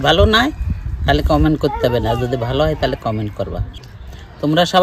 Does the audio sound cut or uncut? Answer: cut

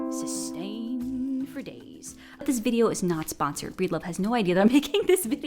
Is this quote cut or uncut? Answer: cut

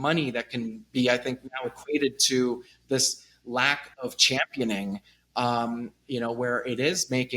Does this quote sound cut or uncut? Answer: uncut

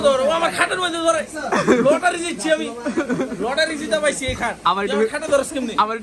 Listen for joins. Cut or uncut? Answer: uncut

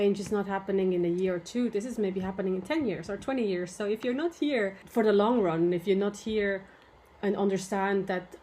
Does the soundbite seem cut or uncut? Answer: cut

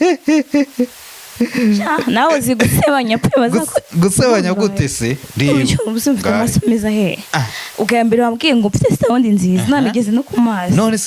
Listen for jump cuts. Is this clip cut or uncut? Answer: uncut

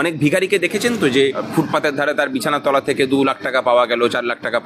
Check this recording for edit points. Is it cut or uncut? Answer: cut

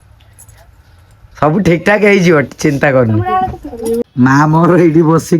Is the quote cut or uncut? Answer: cut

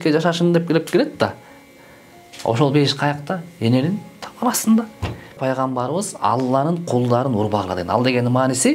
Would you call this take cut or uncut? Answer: cut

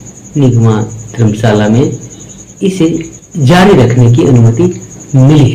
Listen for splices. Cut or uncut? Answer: uncut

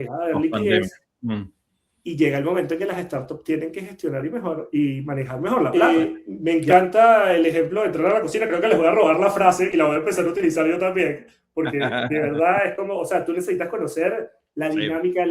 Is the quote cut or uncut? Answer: cut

